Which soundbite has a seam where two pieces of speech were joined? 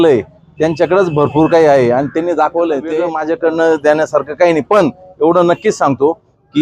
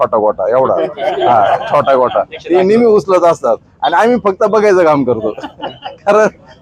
first; 1 cut; at 3.1 s

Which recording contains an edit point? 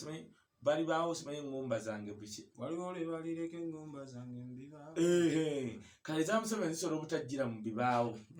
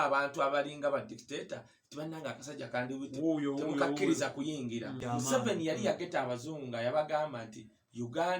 second; 1 cut; at 5.0 s

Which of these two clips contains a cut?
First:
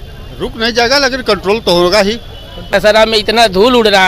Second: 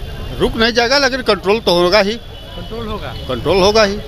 first; 1 cut; at 2.7 s

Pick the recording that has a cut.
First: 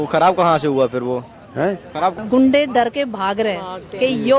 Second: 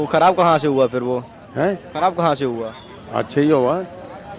first; 1 cut; at 2.1 s

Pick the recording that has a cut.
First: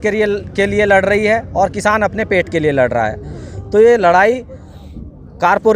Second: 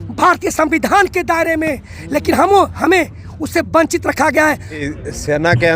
second; 1 cut; at 4.8 s

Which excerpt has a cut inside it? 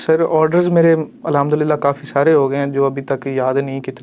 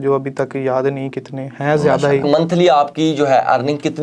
second; 1 cut; at 2.2 s

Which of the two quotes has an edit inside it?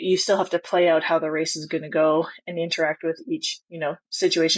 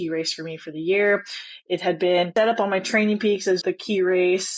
second; 2 cuts; at 2.3 s, 3.6 s

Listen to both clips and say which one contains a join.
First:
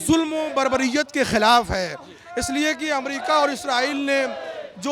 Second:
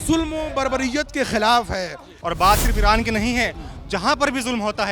second; 1 cut; at 2.1 s

